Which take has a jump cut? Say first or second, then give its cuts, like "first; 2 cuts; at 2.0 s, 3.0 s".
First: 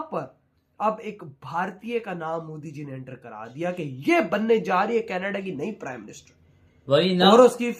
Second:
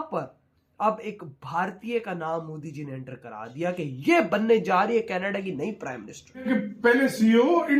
second; 1 cut; at 6.5 s